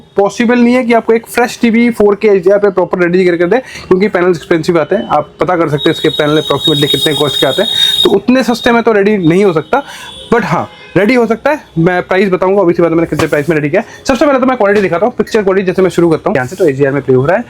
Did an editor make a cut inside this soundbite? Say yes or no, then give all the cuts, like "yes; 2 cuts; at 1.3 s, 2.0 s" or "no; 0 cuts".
no; 0 cuts